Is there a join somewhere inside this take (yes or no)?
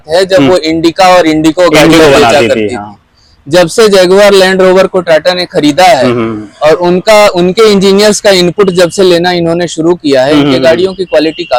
no